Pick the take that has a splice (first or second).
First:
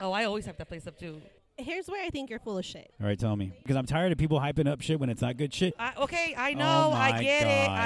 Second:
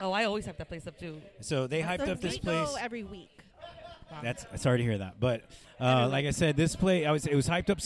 first